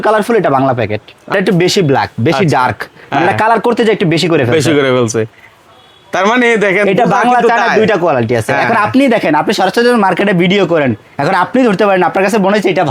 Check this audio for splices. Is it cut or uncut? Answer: uncut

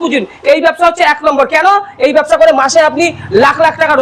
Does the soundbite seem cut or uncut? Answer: uncut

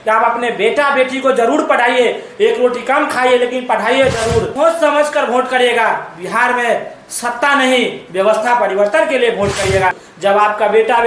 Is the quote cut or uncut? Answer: cut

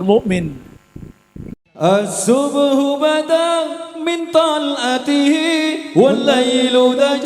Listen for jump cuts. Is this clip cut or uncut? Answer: cut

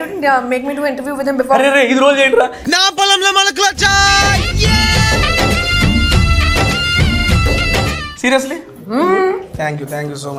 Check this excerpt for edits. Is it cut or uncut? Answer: uncut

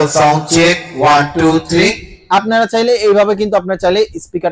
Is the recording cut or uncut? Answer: uncut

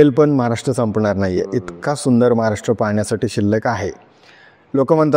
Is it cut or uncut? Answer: uncut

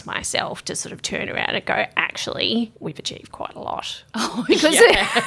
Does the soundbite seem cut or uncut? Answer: uncut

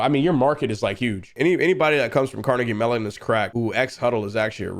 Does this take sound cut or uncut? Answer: cut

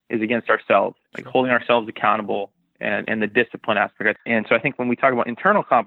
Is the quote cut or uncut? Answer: cut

